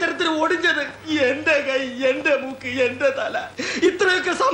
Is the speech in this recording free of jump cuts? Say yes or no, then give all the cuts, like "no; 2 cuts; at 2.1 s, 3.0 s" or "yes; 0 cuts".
yes; 0 cuts